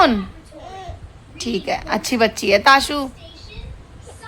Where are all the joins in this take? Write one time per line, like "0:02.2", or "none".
none